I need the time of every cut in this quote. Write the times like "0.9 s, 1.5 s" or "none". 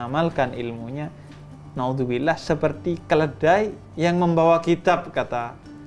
none